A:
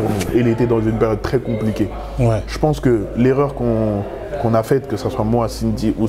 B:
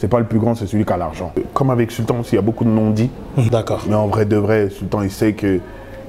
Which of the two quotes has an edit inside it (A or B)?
B